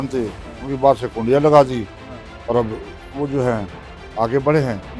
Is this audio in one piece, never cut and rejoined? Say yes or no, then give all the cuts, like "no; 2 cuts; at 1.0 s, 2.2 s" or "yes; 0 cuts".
yes; 0 cuts